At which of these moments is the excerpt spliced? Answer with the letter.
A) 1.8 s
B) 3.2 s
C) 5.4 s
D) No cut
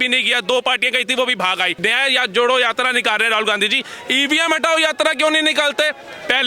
A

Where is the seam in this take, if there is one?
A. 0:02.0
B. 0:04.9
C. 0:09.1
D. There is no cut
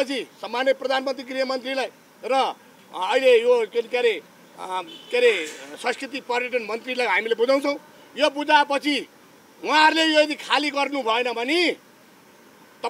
D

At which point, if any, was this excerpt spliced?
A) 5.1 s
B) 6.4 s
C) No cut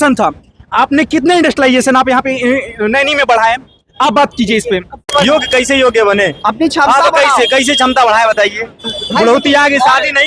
A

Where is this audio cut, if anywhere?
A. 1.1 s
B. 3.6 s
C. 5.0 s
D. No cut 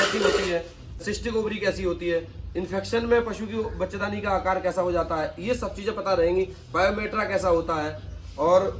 A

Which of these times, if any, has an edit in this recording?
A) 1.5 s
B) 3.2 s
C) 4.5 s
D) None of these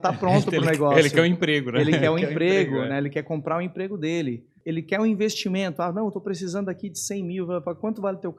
C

